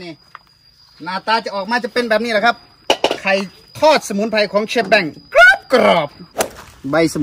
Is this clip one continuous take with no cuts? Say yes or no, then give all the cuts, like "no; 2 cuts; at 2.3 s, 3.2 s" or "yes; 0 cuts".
no; 1 cut; at 6.2 s